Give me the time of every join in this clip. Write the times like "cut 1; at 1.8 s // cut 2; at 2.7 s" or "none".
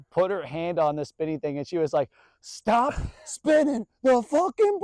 none